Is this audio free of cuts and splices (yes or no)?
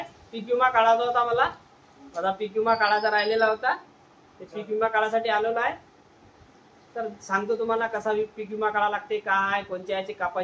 yes